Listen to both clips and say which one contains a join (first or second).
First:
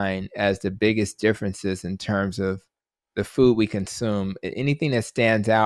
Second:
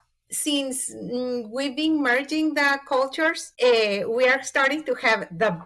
second